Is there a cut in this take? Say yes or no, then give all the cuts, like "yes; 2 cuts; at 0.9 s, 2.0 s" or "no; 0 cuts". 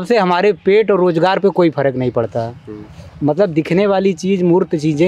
no; 0 cuts